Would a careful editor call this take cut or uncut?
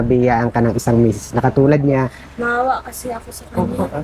uncut